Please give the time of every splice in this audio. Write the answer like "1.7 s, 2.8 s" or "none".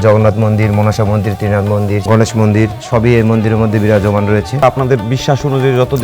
2.0 s, 2.8 s, 4.6 s